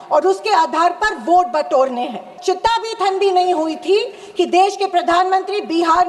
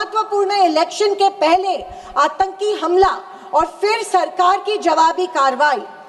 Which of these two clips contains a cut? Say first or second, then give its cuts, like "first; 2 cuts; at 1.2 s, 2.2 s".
first; 1 cut; at 2.3 s